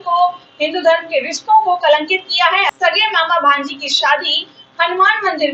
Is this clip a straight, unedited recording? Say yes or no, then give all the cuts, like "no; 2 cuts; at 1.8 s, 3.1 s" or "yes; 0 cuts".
no; 1 cut; at 2.7 s